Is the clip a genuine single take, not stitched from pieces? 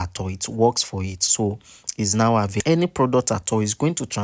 no; 1 cut; at 2.6 s

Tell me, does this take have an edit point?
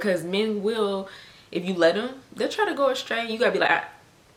no; 0 cuts

